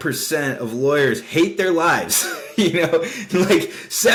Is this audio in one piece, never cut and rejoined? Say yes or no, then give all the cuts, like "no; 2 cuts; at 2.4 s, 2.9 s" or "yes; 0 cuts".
yes; 0 cuts